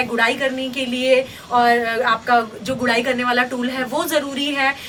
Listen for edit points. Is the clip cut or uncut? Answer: uncut